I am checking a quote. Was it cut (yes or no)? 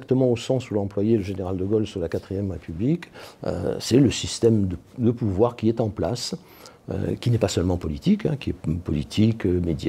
no